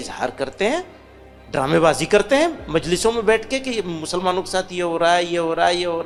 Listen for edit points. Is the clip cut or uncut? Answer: uncut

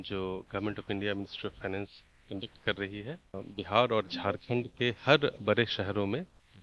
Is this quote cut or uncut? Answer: cut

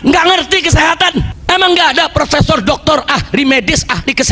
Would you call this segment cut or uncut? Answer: cut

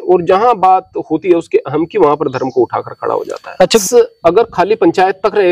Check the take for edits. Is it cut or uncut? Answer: cut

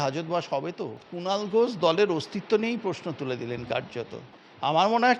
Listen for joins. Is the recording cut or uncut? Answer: cut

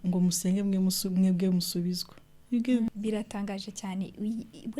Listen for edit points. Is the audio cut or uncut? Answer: cut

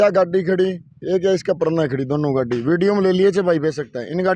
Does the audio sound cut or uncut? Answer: uncut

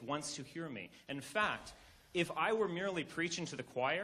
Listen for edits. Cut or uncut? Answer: uncut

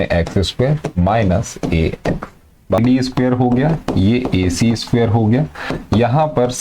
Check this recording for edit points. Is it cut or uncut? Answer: cut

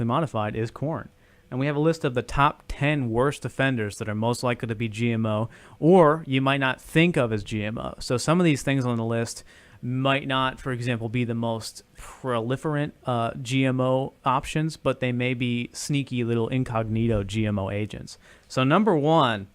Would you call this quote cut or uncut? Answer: cut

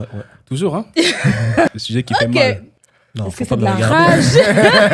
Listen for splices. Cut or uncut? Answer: cut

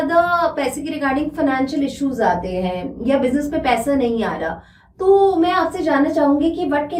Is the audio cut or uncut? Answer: uncut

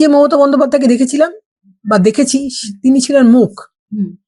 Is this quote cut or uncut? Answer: uncut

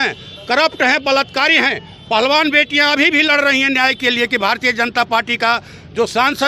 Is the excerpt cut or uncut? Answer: uncut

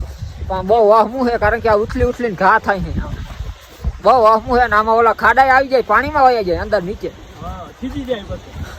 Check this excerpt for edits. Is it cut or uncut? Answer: uncut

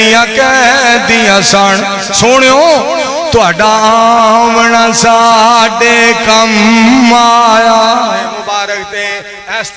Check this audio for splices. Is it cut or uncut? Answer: cut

